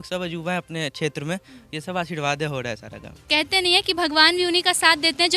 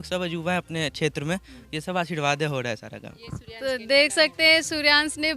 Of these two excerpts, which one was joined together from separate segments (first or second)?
first